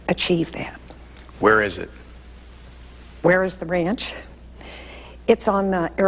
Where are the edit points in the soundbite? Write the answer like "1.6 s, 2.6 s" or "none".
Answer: 3.1 s

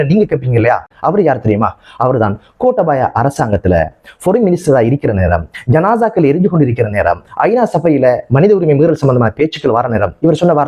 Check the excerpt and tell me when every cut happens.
none

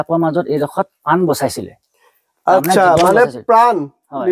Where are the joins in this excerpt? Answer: none

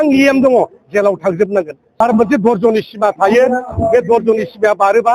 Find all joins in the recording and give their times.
2.0 s

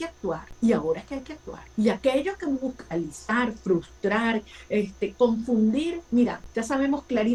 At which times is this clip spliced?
none

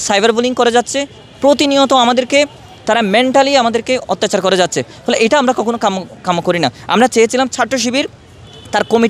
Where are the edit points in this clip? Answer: none

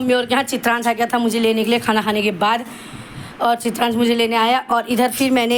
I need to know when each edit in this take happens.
none

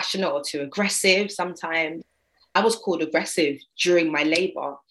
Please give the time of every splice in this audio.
2.5 s

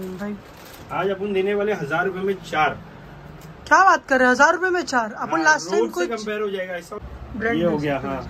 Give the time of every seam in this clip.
6.9 s

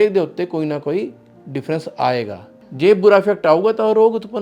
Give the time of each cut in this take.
2.6 s

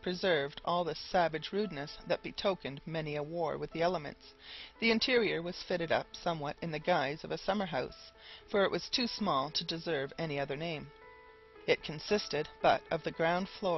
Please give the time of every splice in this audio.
7.2 s

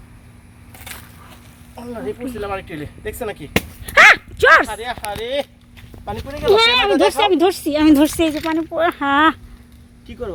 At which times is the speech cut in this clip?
none

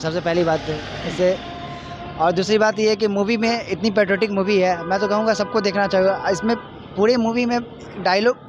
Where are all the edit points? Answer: none

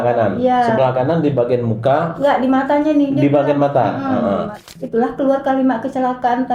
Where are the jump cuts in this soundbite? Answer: 4.6 s

